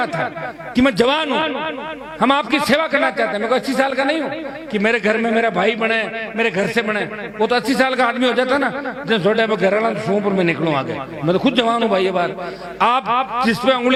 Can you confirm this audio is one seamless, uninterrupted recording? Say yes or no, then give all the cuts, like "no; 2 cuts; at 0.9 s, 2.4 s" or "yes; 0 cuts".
yes; 0 cuts